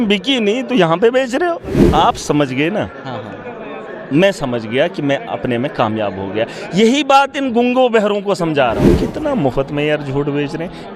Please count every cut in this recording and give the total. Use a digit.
2